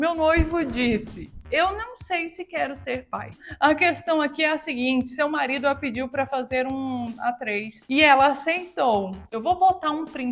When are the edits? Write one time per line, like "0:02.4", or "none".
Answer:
0:03.3
0:09.2